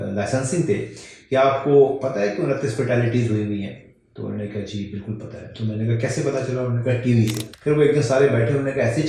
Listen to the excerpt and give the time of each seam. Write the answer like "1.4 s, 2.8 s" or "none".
7.5 s